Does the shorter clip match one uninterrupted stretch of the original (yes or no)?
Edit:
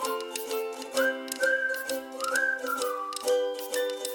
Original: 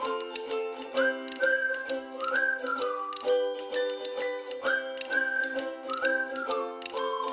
yes